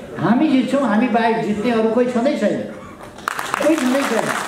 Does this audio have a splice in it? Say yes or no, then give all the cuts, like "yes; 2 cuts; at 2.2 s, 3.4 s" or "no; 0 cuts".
no; 0 cuts